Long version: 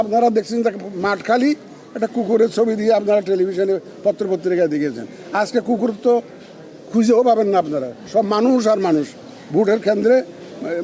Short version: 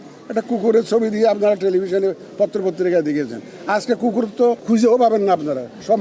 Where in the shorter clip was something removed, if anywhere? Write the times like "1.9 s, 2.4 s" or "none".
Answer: 4.6 s